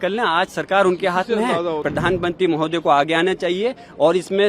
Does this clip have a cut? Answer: yes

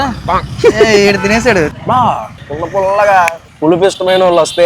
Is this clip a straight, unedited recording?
no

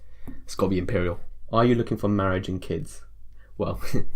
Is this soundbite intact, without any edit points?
no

